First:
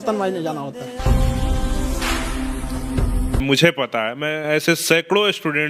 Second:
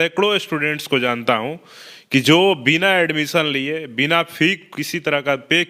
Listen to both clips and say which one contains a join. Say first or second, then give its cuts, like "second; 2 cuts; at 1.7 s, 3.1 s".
first; 1 cut; at 3.4 s